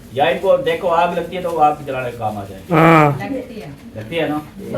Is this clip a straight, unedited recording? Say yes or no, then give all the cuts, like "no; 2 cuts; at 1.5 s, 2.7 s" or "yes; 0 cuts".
yes; 0 cuts